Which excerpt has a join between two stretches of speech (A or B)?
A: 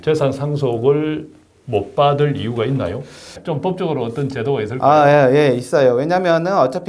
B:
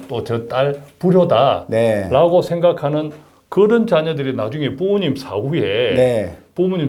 A